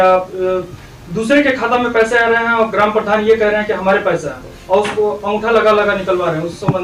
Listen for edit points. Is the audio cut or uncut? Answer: uncut